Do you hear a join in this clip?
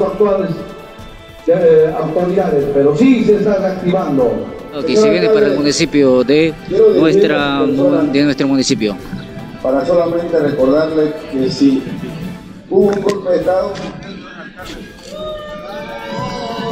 yes; 1 cut; at 4.8 s

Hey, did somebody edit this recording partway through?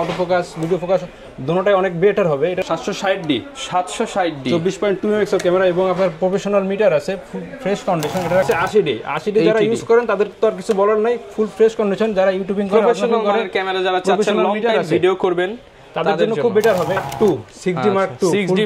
yes; 3 cuts; at 2.6 s, 8.5 s, 17.0 s

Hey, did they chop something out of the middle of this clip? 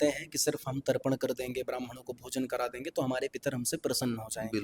no; 0 cuts

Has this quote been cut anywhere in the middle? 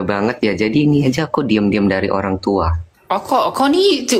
yes; 1 cut; at 2.9 s

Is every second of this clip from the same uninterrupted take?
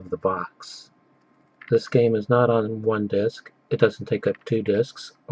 no; 1 cut; at 2.6 s

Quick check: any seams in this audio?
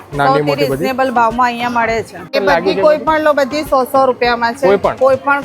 yes; 1 cut; at 2.3 s

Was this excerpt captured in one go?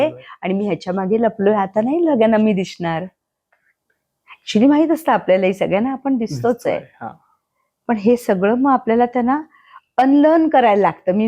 yes; 0 cuts

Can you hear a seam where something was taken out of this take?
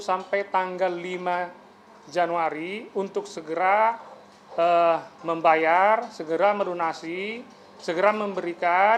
no; 0 cuts

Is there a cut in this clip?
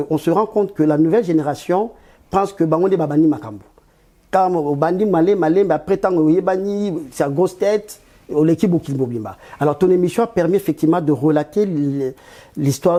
no; 0 cuts

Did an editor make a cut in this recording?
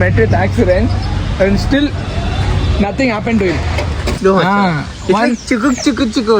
yes; 1 cut; at 4.2 s

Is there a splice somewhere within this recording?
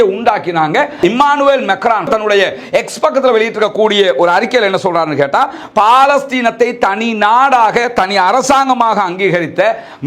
yes; 2 cuts; at 1.0 s, 2.1 s

